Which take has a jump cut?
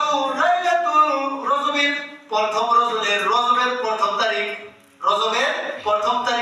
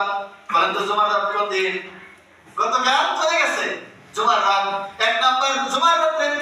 second; 1 cut; at 2.4 s

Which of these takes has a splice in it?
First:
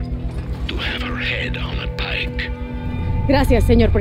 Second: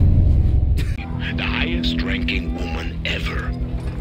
second; 1 cut; at 1.0 s

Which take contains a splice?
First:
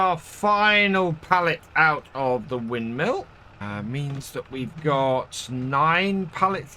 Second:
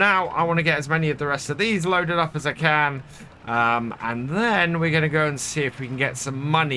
first; 1 cut; at 3.4 s

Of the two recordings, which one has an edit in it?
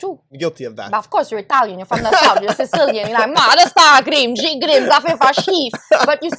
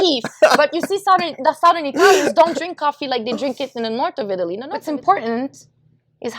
second; 1 cut; at 4.7 s

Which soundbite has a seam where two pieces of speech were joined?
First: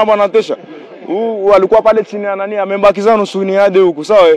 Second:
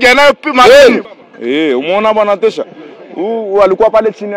second; 1 cut; at 1.1 s

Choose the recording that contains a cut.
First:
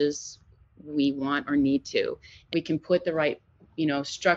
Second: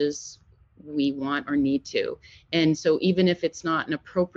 first; 1 cut; at 2.3 s

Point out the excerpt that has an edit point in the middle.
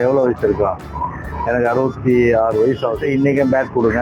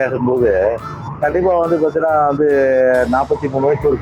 first; 1 cut; at 3.0 s

